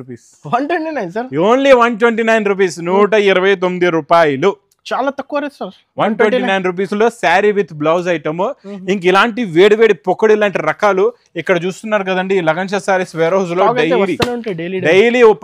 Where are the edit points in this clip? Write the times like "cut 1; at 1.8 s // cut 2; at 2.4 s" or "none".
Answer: none